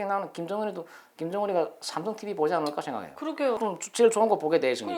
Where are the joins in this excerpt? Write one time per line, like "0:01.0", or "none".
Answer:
0:03.6